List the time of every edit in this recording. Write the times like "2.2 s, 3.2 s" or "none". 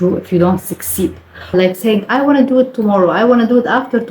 1.4 s